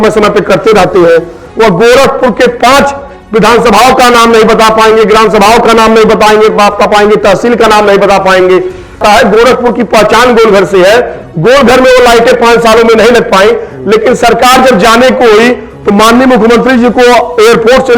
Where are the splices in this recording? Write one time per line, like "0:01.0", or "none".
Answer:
0:09.0